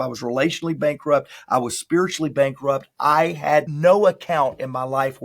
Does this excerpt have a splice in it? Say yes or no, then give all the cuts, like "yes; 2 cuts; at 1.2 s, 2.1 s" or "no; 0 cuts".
yes; 1 cut; at 3.7 s